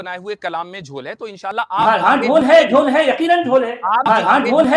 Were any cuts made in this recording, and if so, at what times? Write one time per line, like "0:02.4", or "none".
0:01.6
0:04.1